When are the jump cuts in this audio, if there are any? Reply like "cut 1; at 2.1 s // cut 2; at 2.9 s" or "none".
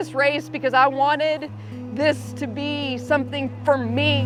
none